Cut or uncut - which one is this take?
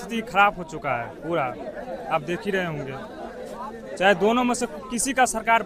uncut